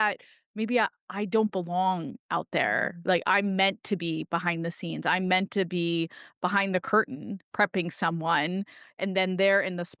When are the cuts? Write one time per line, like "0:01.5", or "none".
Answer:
0:09.0